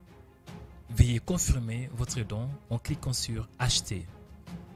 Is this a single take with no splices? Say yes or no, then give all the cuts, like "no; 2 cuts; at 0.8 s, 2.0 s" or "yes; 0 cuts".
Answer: yes; 0 cuts